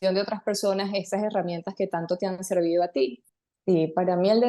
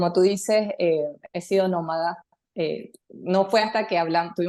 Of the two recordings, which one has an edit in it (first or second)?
first